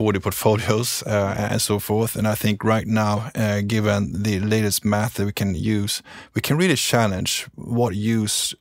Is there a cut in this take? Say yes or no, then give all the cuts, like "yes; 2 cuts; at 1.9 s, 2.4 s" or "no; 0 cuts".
no; 0 cuts